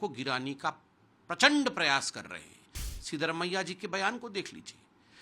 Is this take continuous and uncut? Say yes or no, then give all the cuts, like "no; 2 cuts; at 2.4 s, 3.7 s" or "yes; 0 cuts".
no; 1 cut; at 2.8 s